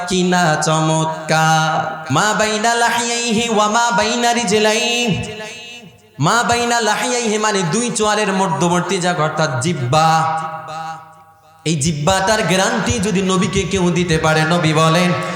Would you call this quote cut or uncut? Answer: cut